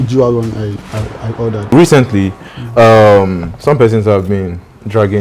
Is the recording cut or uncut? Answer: cut